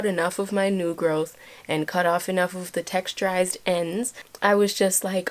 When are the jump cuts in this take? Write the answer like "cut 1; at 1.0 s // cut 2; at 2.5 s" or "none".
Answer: cut 1; at 4.2 s